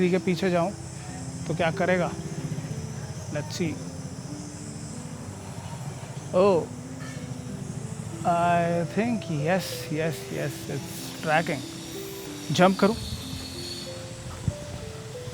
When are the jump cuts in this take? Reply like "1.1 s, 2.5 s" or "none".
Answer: none